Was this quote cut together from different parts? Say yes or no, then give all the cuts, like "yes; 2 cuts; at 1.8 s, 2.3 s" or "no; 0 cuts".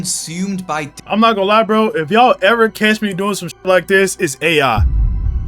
yes; 1 cut; at 0.9 s